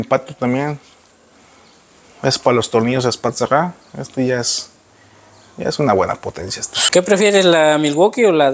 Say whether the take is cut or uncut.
uncut